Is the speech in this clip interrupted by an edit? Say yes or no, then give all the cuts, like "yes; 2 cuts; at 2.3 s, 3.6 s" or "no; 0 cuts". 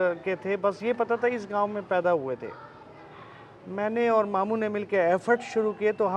no; 0 cuts